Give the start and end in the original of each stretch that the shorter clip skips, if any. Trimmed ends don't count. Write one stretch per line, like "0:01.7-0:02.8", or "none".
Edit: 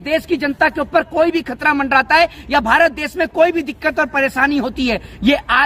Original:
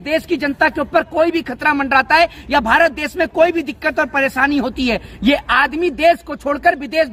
none